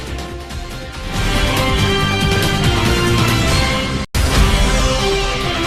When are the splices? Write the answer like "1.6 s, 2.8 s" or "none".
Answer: none